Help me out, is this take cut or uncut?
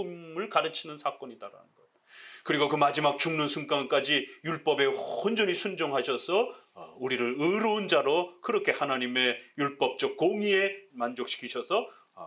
cut